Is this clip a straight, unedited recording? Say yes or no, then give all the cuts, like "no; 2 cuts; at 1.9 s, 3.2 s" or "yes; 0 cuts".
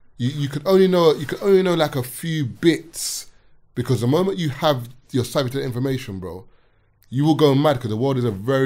yes; 0 cuts